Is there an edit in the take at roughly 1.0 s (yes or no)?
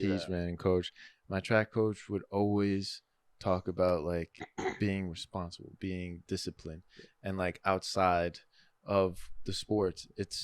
yes